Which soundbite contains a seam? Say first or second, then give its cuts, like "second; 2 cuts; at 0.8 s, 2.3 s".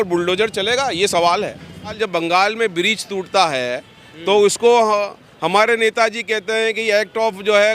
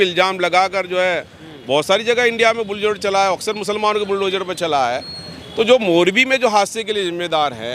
first; 1 cut; at 2.0 s